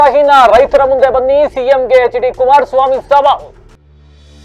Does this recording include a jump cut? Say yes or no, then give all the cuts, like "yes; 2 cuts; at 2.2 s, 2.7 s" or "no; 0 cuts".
no; 0 cuts